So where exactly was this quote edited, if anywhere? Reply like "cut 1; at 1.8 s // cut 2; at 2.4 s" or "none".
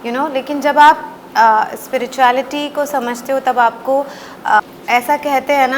cut 1; at 4.6 s